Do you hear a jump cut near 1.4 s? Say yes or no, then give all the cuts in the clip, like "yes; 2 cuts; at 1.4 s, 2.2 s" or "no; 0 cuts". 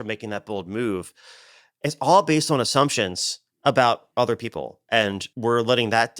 no; 1 cut; at 5.3 s